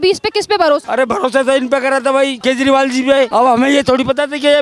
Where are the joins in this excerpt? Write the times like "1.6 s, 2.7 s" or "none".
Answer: 0.9 s, 2.4 s, 3.3 s